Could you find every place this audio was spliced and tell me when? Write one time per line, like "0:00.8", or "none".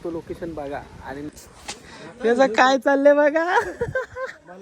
0:01.3